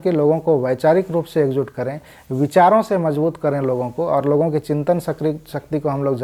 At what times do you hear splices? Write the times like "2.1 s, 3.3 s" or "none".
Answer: none